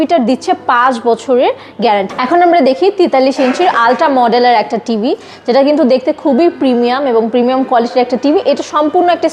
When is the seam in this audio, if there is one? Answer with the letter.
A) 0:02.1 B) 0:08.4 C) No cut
A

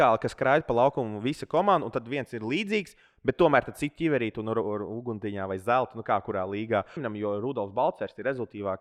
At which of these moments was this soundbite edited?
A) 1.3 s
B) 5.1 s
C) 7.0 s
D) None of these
C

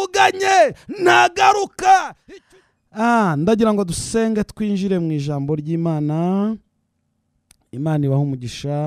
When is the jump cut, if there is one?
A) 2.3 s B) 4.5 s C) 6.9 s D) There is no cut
A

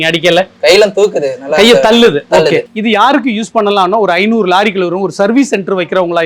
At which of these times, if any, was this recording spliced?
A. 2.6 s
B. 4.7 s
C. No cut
A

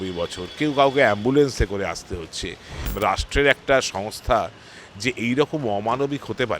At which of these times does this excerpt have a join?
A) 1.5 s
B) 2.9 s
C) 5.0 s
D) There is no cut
B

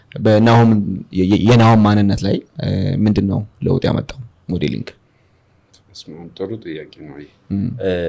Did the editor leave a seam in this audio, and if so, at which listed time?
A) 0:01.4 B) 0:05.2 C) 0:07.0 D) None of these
D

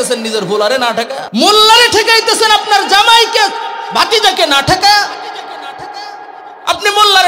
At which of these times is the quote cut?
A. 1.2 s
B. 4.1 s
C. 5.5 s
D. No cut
A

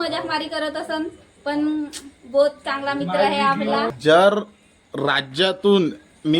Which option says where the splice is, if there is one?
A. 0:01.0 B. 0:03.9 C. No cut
B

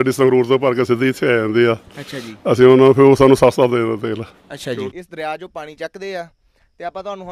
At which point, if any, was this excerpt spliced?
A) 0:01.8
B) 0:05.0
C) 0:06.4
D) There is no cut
B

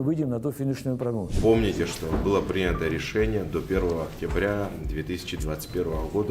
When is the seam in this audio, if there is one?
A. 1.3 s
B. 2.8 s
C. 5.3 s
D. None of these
A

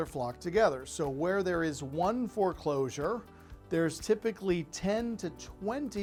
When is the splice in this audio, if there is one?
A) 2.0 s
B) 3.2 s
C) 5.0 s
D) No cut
D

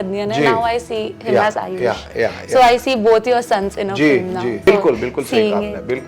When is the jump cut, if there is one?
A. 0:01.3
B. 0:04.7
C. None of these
B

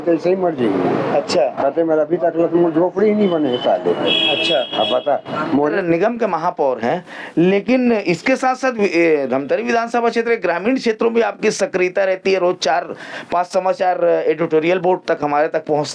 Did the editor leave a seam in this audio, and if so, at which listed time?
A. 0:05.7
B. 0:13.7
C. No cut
A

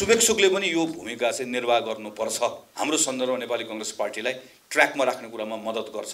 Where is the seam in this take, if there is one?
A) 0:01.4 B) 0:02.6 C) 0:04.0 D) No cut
B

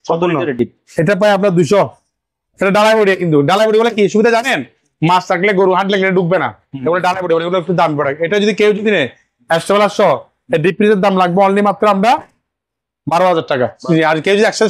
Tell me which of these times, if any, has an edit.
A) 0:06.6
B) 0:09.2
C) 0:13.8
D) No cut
C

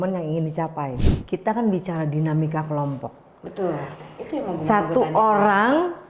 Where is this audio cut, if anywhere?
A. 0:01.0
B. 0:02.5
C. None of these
A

